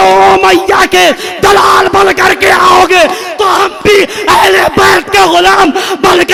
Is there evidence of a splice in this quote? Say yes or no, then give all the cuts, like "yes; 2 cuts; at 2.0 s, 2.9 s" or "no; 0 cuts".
no; 0 cuts